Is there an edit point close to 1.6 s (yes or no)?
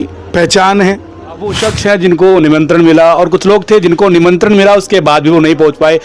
yes